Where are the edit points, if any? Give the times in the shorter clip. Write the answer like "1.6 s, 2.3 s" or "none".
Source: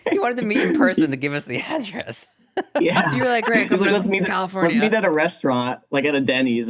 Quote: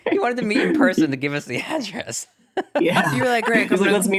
none